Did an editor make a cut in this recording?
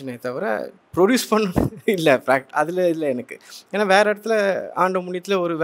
no; 0 cuts

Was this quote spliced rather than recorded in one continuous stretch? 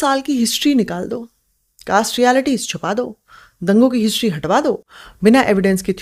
no; 0 cuts

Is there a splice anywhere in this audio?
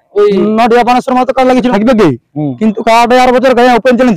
yes; 1 cut; at 1.7 s

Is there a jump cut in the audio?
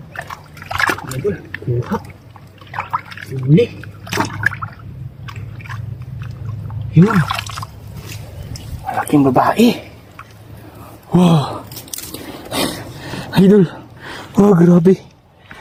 no; 0 cuts

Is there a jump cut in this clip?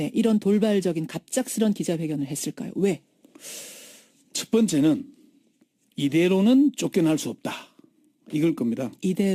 no; 0 cuts

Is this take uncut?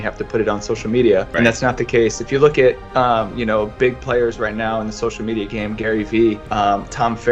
yes; 0 cuts

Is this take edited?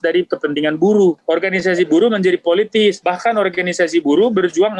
yes; 2 cuts; at 1.2 s, 3.0 s

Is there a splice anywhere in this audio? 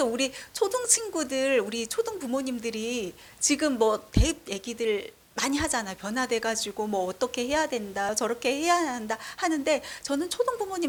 no; 0 cuts

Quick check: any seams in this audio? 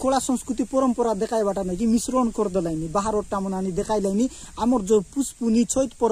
no; 0 cuts

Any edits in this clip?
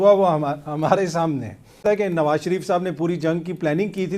yes; 1 cut; at 1.8 s

